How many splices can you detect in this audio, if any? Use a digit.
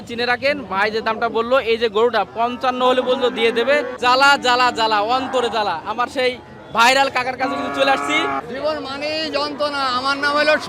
2